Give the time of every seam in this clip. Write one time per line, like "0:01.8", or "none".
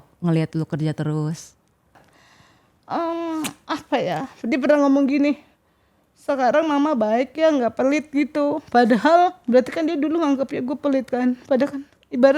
0:02.0